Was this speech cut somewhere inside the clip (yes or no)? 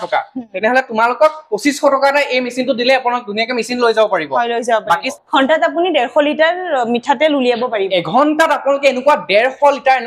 yes